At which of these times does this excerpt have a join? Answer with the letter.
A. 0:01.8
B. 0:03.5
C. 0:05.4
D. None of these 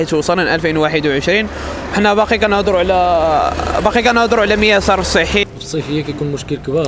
C